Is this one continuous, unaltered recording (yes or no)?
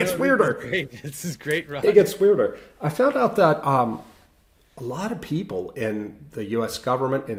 yes